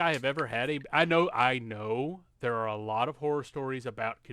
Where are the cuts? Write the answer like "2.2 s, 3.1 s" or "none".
none